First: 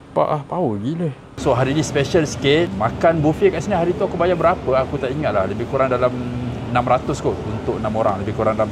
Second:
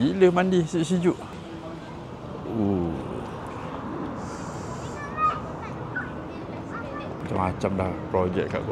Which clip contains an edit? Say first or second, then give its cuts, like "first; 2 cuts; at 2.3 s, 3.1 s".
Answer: first; 1 cut; at 1.3 s